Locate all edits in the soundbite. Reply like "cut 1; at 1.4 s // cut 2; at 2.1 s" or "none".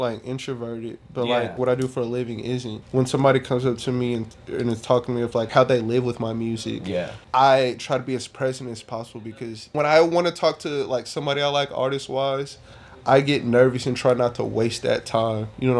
cut 1; at 1.6 s // cut 2; at 2.8 s // cut 3; at 5.5 s // cut 4; at 7.2 s // cut 5; at 9.7 s